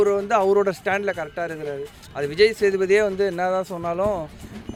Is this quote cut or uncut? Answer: uncut